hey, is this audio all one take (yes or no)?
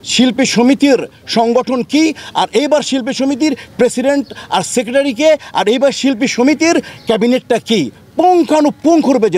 yes